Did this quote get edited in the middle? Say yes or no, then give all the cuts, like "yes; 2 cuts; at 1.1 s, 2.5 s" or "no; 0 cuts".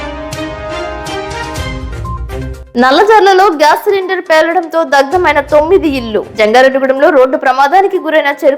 yes; 1 cut; at 2.5 s